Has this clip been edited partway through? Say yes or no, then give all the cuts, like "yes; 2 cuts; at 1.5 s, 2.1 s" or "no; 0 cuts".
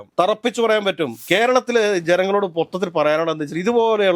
yes; 1 cut; at 1.2 s